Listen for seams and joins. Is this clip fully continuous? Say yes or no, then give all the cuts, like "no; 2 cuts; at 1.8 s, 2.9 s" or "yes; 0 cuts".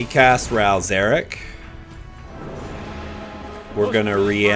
no; 1 cut; at 2.3 s